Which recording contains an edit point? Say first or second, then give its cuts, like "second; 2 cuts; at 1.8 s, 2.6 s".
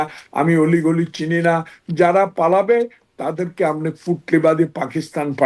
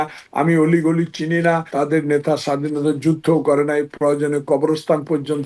second; 1 cut; at 1.7 s